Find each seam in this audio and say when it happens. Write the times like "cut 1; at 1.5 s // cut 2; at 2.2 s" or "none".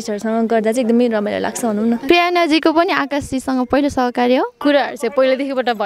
cut 1; at 2.0 s // cut 2; at 4.5 s